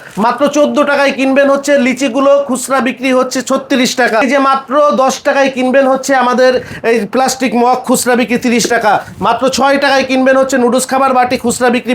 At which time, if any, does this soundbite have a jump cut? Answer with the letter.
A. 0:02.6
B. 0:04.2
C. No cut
B